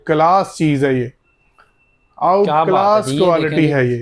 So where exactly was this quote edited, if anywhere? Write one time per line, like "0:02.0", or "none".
none